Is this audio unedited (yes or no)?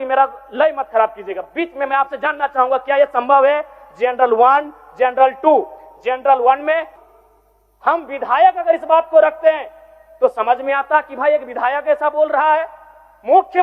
no